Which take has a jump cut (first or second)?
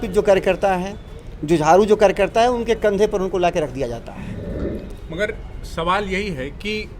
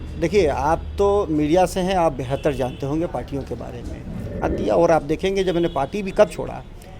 second